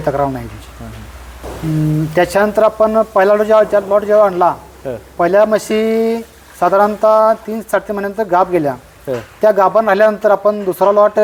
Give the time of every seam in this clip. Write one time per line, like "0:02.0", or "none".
none